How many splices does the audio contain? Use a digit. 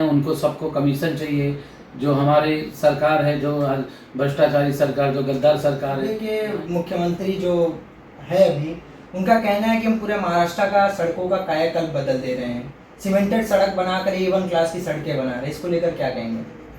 1